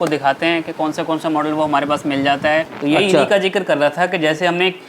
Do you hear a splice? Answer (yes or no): yes